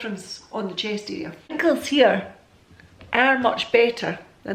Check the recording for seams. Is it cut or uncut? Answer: cut